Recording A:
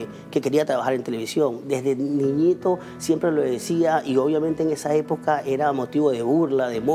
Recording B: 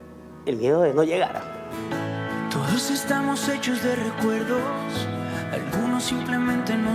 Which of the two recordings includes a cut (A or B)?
B